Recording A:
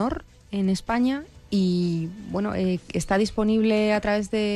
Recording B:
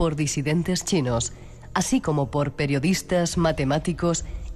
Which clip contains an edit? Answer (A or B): B